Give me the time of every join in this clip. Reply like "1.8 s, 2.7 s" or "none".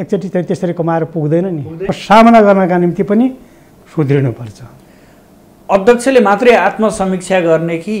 1.9 s

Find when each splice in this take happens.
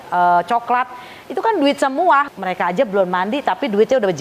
2.3 s

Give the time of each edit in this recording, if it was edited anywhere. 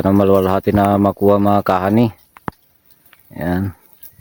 none

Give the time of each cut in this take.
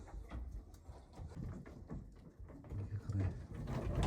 1.3 s

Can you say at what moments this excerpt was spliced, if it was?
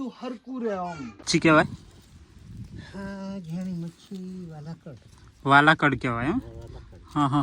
1.2 s

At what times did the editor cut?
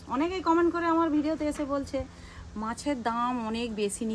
none

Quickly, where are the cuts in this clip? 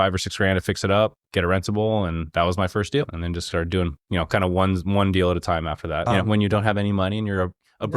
3.2 s, 6.1 s

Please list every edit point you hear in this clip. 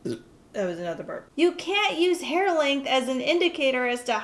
1.2 s

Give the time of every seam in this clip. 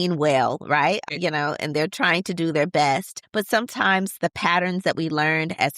1.0 s, 3.2 s

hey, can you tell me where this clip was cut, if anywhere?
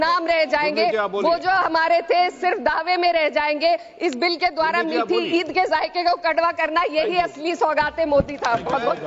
none

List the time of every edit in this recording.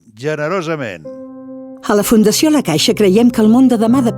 1.1 s

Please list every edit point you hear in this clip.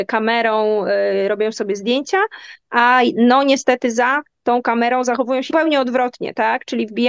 5.5 s

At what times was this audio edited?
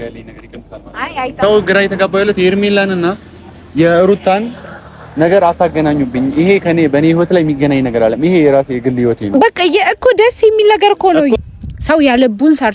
1.3 s, 11.4 s

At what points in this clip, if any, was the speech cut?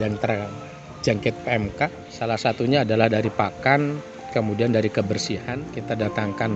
2.1 s, 5.6 s

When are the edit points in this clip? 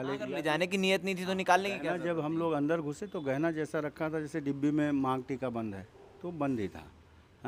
none

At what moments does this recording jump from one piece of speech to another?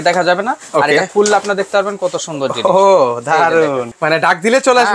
3.9 s

